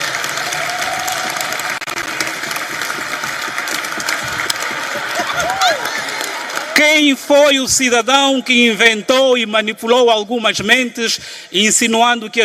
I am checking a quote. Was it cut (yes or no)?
no